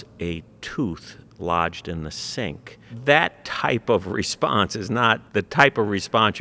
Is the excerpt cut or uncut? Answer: cut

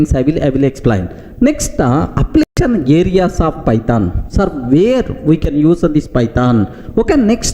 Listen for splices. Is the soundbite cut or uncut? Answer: cut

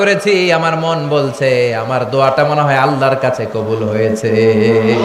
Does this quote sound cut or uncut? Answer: uncut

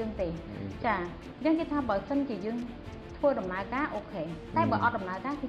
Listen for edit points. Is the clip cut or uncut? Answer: uncut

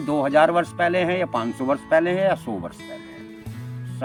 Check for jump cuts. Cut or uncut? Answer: uncut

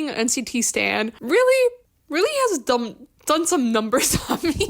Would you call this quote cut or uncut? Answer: cut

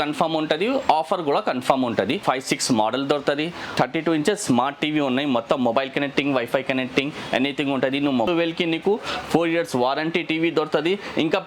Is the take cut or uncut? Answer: cut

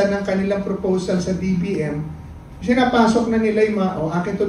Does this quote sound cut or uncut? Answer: uncut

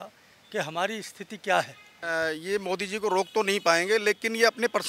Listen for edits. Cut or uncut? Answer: cut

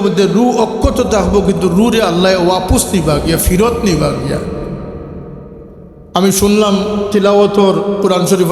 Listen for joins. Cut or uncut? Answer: cut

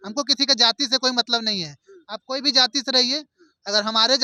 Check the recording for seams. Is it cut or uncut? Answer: uncut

